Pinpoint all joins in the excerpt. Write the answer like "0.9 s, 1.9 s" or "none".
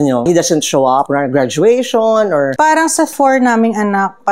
2.5 s